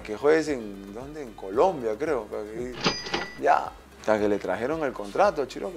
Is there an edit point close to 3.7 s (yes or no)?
no